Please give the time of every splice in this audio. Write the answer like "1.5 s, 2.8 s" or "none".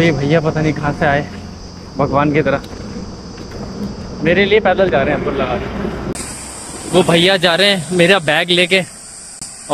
none